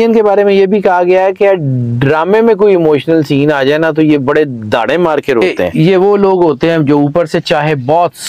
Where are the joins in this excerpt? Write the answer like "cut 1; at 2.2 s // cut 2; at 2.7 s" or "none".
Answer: cut 1; at 5.6 s